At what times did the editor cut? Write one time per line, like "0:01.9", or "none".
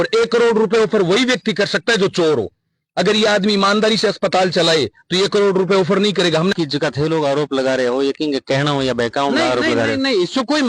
0:06.5